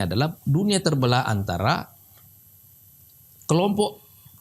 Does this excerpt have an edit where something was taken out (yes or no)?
no